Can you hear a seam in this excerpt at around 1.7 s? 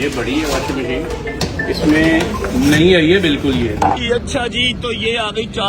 no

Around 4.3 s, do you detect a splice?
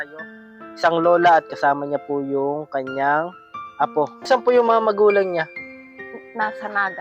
yes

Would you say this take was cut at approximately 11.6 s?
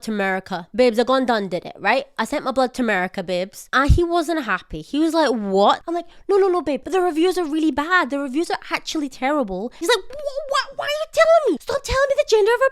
yes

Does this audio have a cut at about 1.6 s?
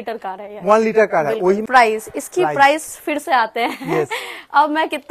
yes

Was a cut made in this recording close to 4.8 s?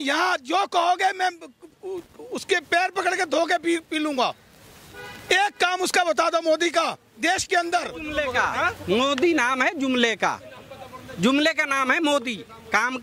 no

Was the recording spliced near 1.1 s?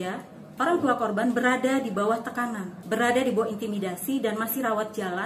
no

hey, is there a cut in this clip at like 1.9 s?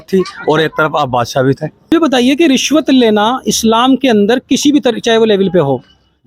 yes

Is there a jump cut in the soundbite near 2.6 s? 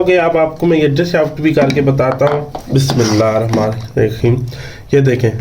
yes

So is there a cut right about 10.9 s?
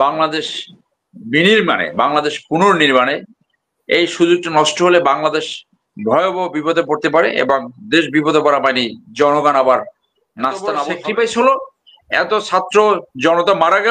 yes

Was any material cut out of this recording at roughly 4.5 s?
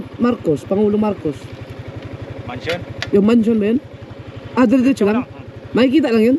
no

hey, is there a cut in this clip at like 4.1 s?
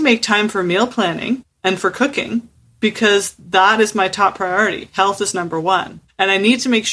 no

